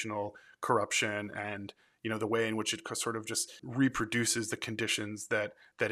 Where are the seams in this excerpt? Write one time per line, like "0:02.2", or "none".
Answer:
0:03.6